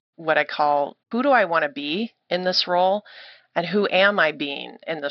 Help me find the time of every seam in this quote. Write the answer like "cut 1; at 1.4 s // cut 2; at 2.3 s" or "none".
cut 1; at 1.0 s // cut 2; at 2.2 s